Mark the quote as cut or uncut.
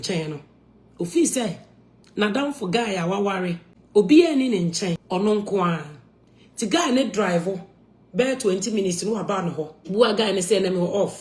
cut